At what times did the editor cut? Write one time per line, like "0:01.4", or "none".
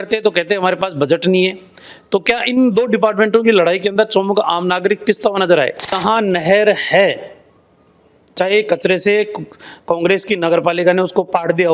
0:05.9